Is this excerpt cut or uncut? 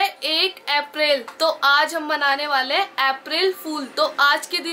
uncut